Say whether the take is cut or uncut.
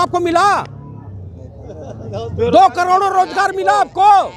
uncut